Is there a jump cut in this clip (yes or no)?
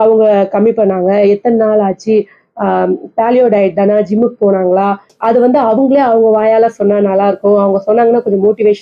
no